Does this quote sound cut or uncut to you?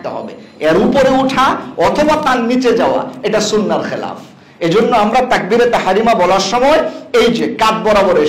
uncut